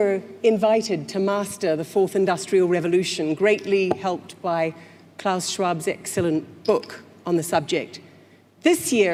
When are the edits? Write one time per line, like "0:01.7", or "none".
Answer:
none